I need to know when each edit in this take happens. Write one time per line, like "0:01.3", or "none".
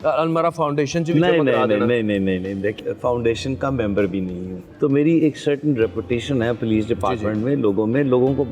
0:02.8
0:04.6